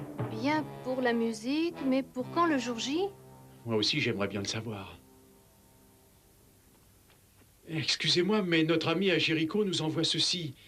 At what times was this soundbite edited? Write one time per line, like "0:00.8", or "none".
none